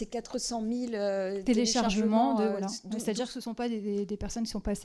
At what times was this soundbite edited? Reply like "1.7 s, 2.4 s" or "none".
none